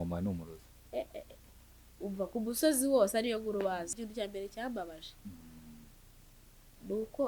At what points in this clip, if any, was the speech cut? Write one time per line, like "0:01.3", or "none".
0:03.9